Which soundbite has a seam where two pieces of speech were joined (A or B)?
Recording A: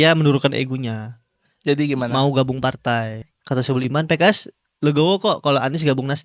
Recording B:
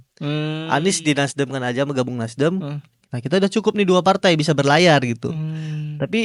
A